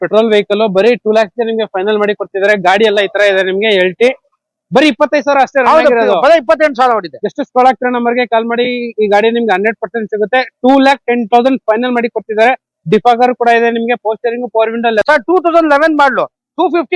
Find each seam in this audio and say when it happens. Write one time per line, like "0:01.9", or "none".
0:15.0